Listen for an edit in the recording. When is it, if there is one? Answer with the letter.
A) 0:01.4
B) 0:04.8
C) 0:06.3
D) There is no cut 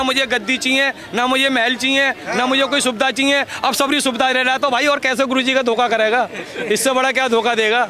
D